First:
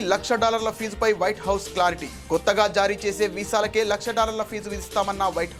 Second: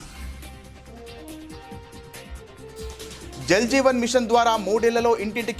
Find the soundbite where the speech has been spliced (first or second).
second